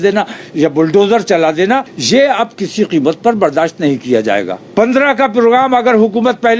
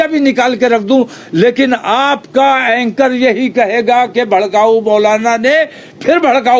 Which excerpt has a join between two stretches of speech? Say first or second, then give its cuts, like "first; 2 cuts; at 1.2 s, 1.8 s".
first; 2 cuts; at 1.9 s, 4.6 s